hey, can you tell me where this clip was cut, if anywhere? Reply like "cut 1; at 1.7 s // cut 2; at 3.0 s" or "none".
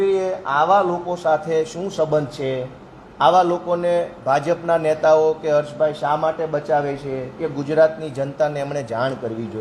none